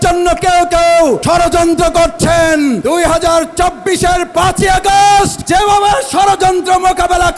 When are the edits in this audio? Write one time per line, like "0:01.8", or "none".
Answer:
0:01.2
0:02.8
0:05.4